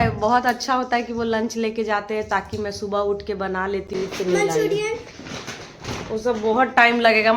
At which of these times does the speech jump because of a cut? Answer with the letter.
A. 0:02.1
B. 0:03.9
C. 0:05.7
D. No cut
B